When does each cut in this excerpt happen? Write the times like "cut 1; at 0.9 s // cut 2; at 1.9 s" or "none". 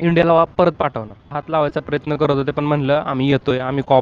cut 1; at 1.4 s

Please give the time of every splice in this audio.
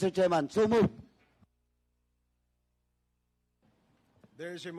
none

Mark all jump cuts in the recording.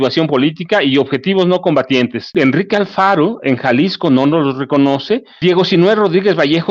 cut 1; at 2.3 s // cut 2; at 5.4 s

